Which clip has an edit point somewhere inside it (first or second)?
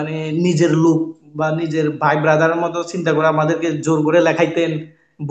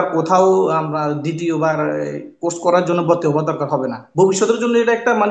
second